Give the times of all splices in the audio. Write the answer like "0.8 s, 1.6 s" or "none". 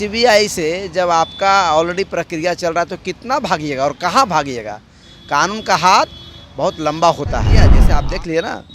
7.8 s